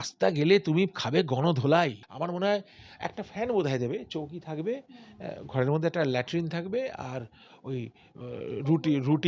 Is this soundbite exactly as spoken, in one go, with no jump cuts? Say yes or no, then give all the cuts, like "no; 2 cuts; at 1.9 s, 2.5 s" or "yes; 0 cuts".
no; 1 cut; at 2.1 s